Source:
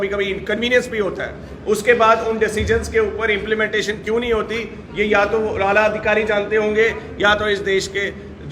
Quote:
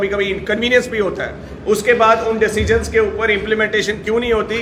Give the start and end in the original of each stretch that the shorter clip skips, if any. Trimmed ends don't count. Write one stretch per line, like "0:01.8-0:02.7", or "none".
none